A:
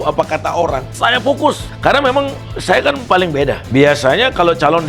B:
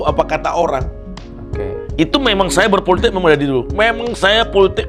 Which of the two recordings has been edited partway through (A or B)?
A